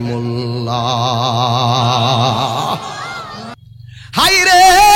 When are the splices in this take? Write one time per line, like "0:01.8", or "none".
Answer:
0:03.5